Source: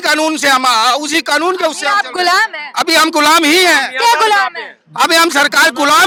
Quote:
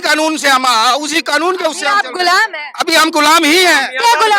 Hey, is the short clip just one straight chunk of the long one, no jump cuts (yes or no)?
yes